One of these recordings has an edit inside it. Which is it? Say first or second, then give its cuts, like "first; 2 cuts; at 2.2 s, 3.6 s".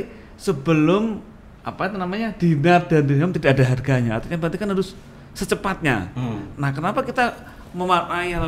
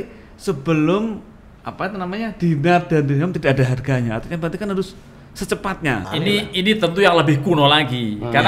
second; 1 cut; at 6.1 s